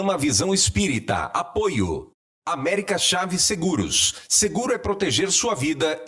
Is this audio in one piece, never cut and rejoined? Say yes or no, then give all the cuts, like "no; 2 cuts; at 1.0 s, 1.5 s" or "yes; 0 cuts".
yes; 0 cuts